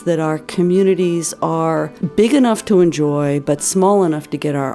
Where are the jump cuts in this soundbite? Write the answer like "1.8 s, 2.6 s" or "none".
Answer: 2.0 s